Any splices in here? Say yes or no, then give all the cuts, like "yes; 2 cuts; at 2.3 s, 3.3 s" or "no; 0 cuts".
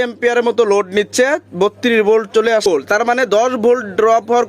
yes; 1 cut; at 2.7 s